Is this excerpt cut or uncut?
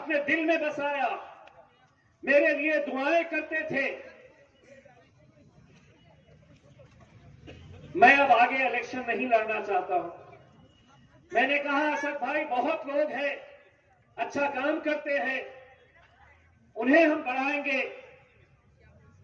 uncut